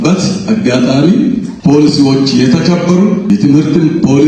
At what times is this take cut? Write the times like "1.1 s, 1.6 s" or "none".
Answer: 1.5 s, 3.3 s

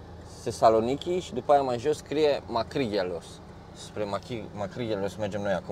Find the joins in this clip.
none

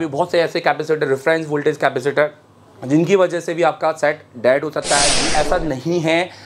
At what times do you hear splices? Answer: 5.2 s

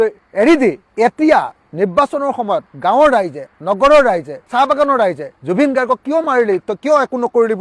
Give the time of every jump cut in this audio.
none

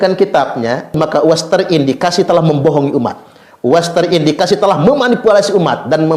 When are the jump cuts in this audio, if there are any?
1.0 s

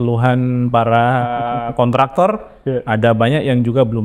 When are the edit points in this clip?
none

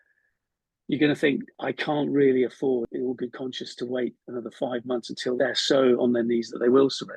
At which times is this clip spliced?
1.5 s, 2.9 s, 5.4 s

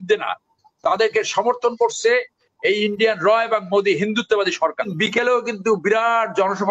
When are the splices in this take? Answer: 4.9 s

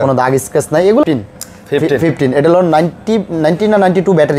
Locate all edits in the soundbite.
1.0 s

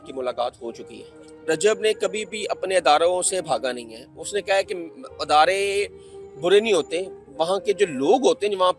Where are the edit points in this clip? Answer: 1.3 s

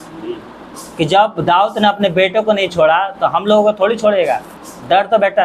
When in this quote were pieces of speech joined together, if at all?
none

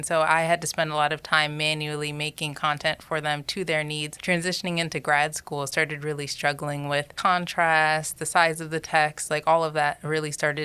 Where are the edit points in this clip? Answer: 4.1 s, 7.2 s

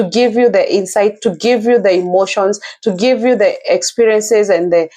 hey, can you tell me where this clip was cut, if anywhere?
none

